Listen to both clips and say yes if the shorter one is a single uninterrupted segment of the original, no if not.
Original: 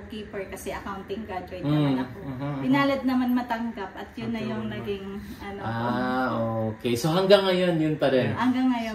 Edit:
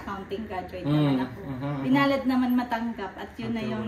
yes